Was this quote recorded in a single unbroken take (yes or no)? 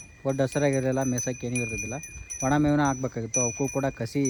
yes